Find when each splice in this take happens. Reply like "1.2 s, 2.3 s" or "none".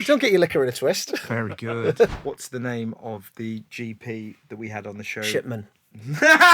1.2 s, 2.2 s